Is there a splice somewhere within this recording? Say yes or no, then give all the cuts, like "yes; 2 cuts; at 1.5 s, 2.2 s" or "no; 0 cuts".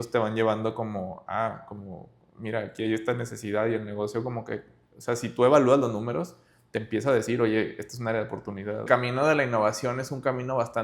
yes; 1 cut; at 8.8 s